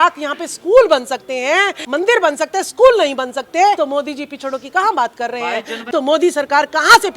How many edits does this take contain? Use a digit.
3